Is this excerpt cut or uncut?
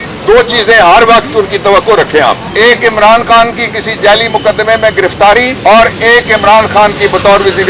cut